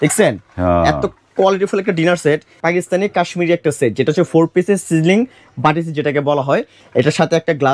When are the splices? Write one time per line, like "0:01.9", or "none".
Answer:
0:02.6
0:06.8